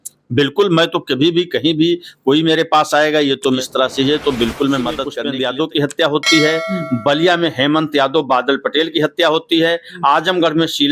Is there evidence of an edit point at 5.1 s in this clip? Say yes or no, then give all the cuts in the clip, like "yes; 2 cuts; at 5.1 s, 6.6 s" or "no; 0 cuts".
yes; 2 cuts; at 3.6 s, 5.1 s